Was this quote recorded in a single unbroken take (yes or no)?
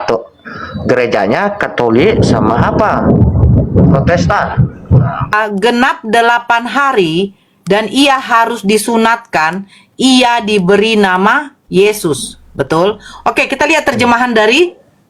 no